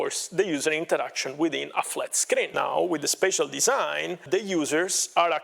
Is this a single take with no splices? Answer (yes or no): no